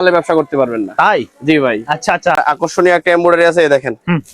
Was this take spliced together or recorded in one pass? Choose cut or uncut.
cut